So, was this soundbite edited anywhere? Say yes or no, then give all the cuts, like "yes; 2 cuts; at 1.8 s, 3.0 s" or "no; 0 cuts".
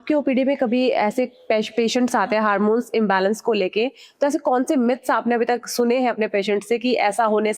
no; 0 cuts